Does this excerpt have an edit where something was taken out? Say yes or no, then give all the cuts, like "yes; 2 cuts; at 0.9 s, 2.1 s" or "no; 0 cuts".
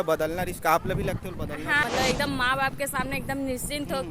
yes; 1 cut; at 1.8 s